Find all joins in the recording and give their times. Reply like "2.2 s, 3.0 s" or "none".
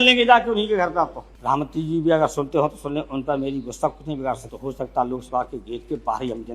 1.3 s, 4.5 s